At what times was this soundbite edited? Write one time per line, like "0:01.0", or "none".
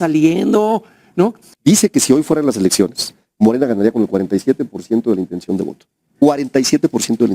0:01.5